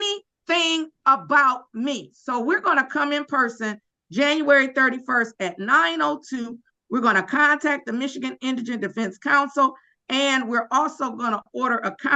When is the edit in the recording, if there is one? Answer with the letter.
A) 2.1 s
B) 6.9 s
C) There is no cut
C